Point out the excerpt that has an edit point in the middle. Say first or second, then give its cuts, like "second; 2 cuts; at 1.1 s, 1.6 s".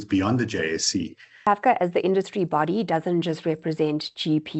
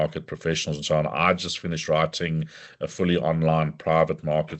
first; 1 cut; at 1.5 s